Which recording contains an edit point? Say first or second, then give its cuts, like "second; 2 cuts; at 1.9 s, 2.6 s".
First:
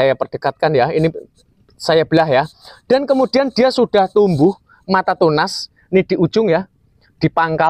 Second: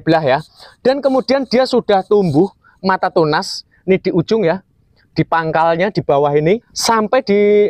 second; 1 cut; at 6.7 s